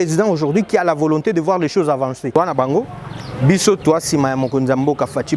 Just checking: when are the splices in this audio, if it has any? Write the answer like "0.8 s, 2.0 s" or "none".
2.3 s

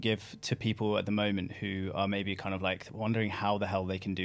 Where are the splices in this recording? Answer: none

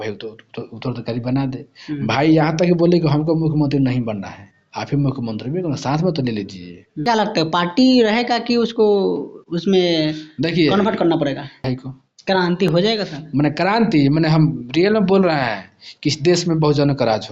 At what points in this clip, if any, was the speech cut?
7.0 s, 11.6 s

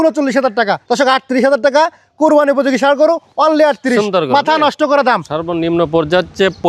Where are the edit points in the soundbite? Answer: 0.8 s, 5.3 s

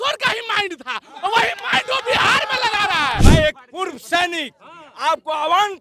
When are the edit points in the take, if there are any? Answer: 3.2 s

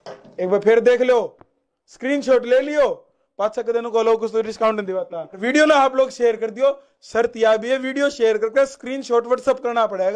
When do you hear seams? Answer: 5.4 s

